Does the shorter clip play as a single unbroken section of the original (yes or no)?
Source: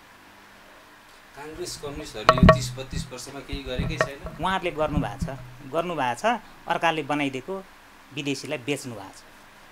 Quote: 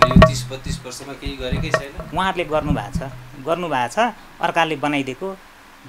yes